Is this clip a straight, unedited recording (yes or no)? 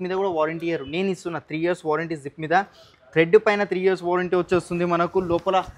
yes